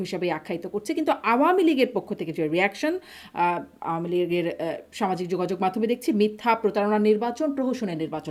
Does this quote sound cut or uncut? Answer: uncut